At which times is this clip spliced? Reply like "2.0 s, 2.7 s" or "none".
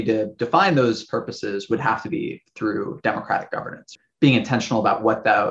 3.9 s